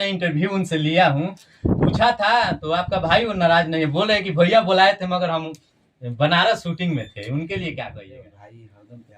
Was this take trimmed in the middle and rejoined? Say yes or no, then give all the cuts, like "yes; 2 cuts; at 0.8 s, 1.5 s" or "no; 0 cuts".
yes; 1 cut; at 8.0 s